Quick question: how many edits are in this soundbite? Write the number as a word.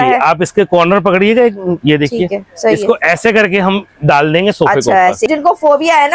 one